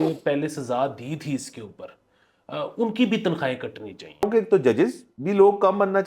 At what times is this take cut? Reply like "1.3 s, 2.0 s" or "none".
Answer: 4.2 s, 5.1 s